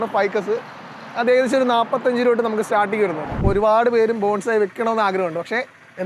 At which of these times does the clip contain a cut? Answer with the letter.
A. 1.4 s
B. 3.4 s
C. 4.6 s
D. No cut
B